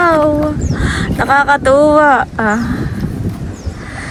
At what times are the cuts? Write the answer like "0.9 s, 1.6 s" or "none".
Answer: none

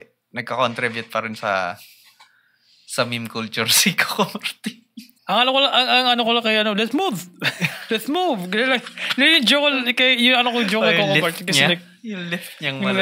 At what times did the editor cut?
5.1 s

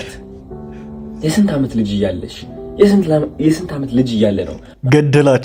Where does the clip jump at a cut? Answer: none

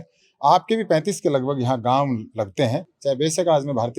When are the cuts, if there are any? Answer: 2.9 s

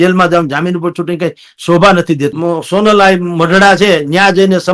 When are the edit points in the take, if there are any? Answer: 2.3 s

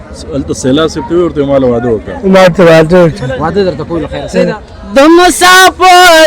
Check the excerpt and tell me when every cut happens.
4.7 s

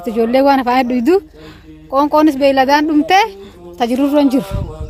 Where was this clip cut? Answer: none

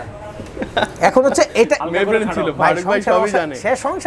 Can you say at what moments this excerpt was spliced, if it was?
1.9 s

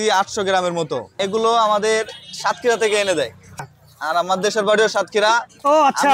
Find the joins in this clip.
1.1 s, 3.6 s

